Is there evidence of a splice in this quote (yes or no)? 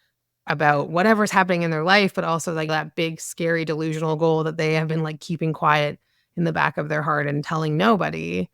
yes